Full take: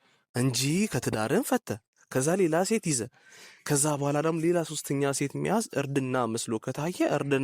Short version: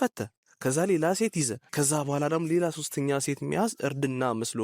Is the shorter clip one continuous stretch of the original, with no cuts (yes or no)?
no